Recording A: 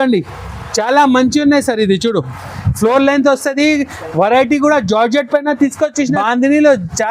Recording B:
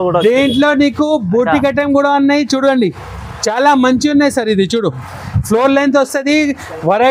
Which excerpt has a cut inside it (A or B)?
A